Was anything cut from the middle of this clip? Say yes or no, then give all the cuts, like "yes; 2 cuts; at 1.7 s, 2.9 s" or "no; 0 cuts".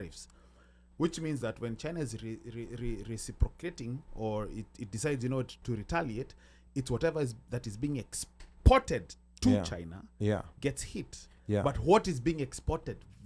no; 0 cuts